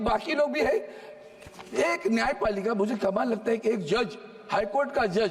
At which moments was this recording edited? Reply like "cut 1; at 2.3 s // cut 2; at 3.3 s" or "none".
none